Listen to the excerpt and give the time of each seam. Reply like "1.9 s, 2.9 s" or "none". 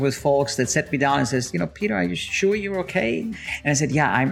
3.3 s